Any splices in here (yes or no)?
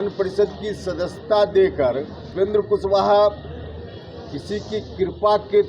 yes